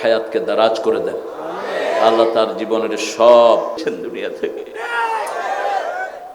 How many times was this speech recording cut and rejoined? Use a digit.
1